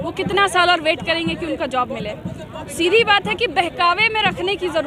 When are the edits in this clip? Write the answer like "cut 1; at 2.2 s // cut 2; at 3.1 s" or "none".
none